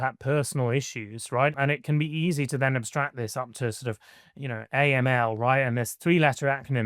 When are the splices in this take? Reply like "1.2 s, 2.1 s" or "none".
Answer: 1.6 s